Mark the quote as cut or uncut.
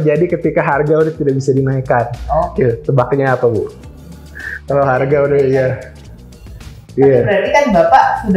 uncut